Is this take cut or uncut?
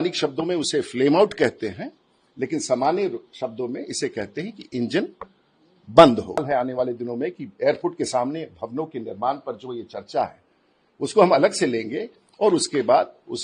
cut